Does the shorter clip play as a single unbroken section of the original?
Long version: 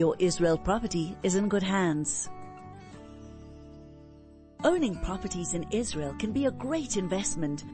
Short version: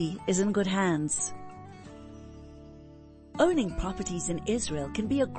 no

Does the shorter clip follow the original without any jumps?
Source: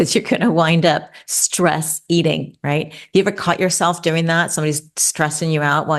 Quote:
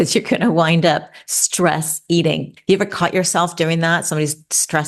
no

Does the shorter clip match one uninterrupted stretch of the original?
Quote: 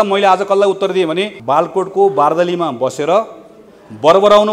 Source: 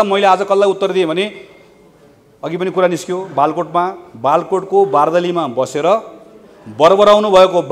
no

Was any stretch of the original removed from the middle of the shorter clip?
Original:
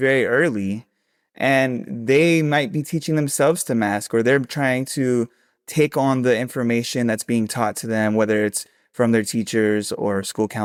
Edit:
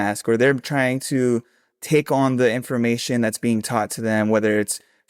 no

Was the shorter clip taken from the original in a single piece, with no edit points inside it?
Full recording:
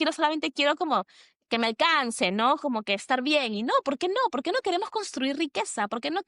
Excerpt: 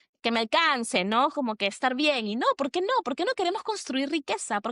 yes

